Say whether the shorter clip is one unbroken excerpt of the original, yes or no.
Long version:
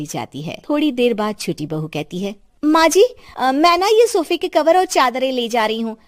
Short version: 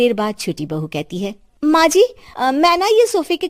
yes